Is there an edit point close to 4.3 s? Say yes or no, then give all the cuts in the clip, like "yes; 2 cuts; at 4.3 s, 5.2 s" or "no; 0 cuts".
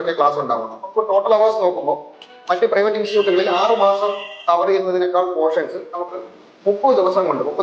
no; 0 cuts